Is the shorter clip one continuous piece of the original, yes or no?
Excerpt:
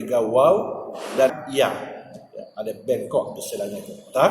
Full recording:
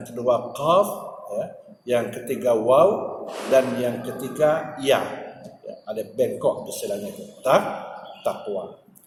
no